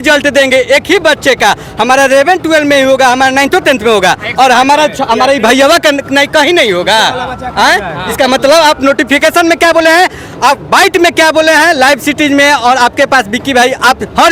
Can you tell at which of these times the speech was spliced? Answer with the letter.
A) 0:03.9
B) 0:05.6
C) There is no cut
C